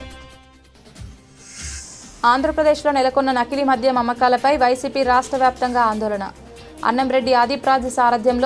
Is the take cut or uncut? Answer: uncut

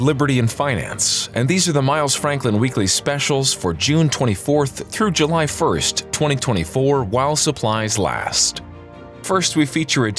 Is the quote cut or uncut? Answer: uncut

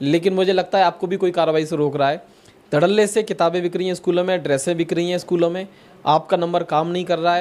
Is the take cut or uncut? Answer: uncut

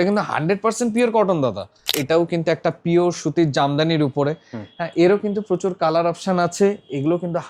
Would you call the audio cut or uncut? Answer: cut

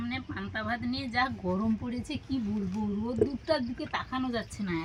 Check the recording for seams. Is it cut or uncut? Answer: uncut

